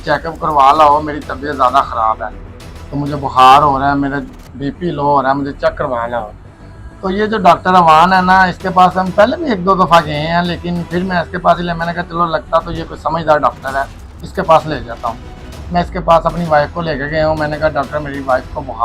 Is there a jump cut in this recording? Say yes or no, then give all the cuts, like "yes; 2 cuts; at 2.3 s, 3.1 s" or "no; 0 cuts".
no; 0 cuts